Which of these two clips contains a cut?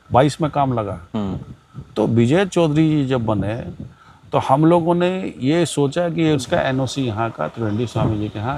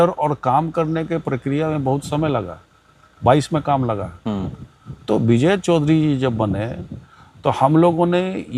first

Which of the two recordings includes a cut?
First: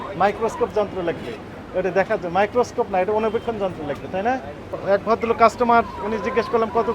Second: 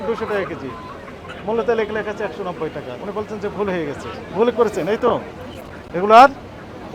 first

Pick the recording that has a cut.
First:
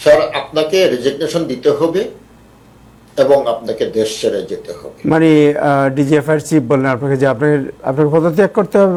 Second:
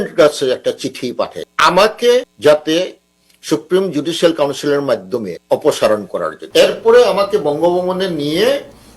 second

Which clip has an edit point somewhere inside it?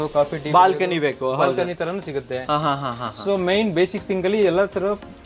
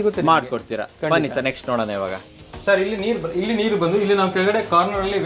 second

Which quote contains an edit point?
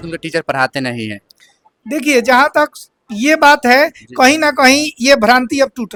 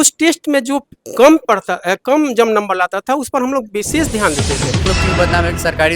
second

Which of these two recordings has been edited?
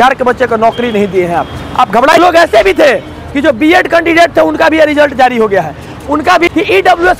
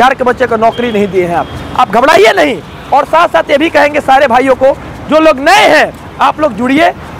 first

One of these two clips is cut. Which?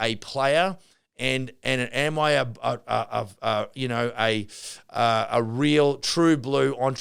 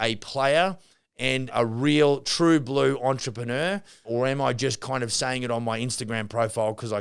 second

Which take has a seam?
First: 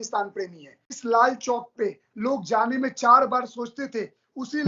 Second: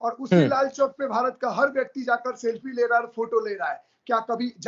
first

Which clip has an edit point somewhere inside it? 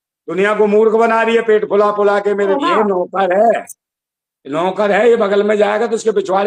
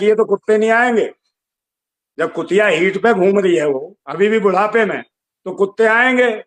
first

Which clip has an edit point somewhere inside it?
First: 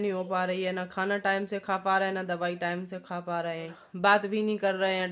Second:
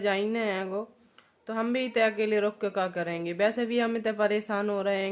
first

